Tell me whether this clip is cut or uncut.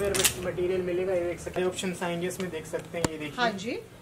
cut